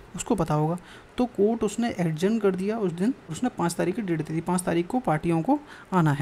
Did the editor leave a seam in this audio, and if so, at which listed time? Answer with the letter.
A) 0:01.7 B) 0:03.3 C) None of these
B